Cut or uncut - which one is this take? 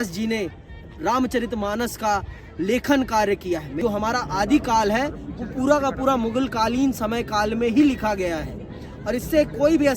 cut